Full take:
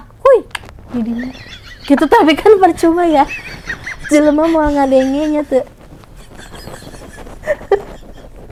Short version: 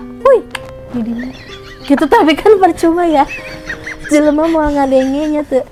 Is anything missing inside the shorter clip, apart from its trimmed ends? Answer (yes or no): no